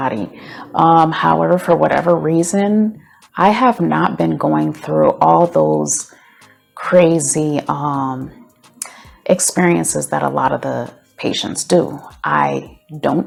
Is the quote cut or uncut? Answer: uncut